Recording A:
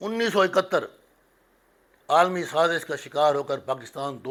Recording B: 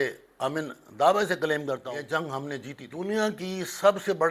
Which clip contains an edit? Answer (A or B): B